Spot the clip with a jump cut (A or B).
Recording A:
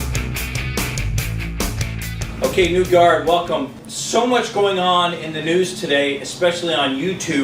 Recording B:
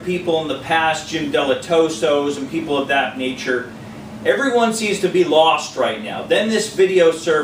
A